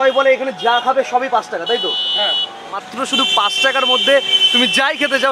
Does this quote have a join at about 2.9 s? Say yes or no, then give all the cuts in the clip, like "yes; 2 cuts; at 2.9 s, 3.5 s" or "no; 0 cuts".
yes; 1 cut; at 2.9 s